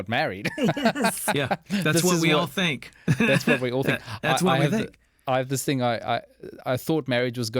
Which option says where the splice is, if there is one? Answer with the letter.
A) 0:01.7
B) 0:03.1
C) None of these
C